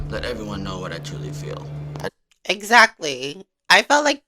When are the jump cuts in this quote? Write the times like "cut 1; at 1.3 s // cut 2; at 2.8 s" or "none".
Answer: cut 1; at 2.3 s